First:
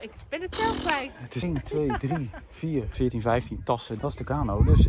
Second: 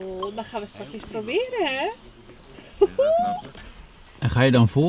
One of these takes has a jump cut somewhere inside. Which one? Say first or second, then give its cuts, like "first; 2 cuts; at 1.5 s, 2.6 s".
first; 3 cuts; at 1.4 s, 2.9 s, 3.9 s